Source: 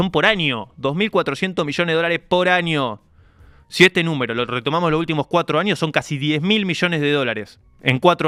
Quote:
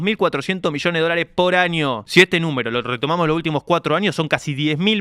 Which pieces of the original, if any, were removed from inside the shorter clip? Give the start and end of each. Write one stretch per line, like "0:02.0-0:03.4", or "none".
0:03.0-0:03.7